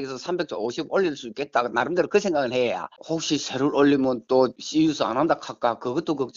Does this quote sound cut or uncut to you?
cut